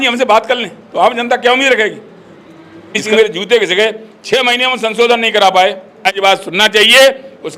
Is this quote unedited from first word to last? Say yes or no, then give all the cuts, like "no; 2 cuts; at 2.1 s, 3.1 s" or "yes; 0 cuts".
no; 2 cuts; at 3.0 s, 6.1 s